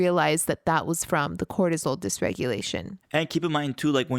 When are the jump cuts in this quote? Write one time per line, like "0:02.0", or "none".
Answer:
0:03.0